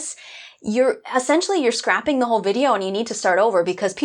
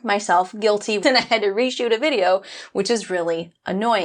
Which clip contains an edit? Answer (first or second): second